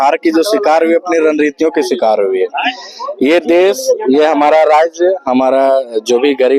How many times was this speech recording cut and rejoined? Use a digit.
0